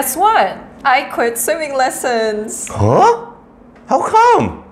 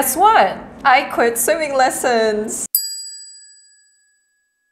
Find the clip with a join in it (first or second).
first